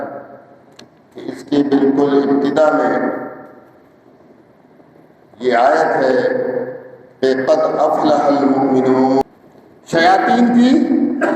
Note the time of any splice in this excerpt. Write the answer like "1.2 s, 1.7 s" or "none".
9.2 s